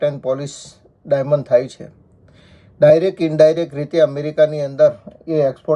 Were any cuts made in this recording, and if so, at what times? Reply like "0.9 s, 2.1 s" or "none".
none